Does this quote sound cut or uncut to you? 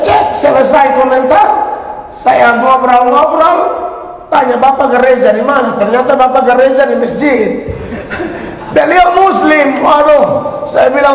uncut